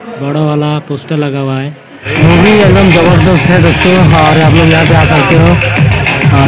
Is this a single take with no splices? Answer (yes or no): no